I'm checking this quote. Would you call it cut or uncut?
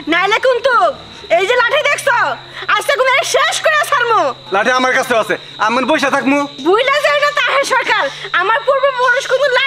cut